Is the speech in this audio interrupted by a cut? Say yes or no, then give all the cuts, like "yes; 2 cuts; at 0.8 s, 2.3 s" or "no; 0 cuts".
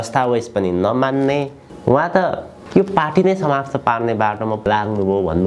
yes; 3 cuts; at 1.6 s, 2.5 s, 4.6 s